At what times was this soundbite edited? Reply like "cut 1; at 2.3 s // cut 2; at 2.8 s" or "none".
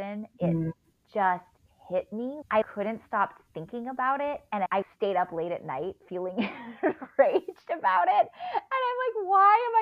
cut 1; at 2.6 s // cut 2; at 4.7 s // cut 3; at 6.0 s

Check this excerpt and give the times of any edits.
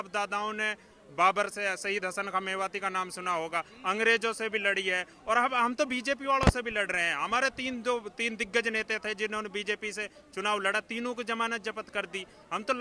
none

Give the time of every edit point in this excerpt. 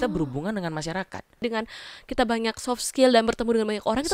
cut 1; at 1.4 s

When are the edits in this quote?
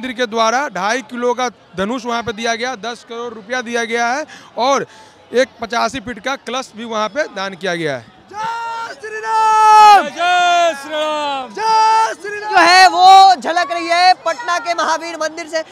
none

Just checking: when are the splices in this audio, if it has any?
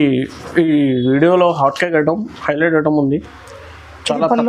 none

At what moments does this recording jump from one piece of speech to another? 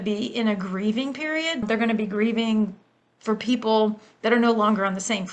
cut 1; at 1.6 s

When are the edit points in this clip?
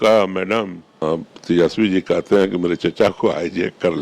cut 1; at 1.3 s

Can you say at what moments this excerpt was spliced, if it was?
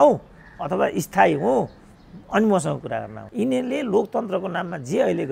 cut 1; at 3.2 s

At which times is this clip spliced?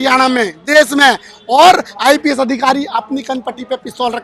none

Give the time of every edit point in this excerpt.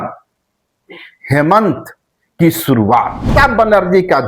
cut 1; at 3.3 s

